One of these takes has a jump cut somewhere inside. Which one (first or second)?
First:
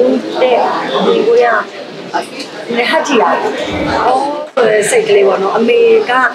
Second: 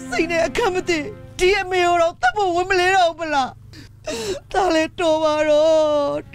first